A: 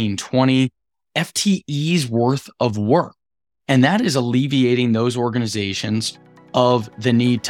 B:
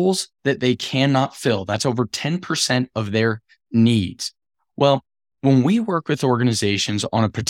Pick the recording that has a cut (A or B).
A